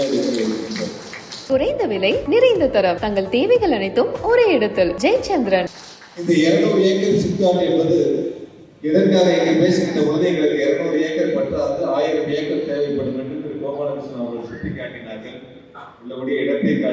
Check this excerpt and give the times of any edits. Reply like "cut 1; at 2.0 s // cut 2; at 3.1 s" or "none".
cut 1; at 1.3 s // cut 2; at 5.7 s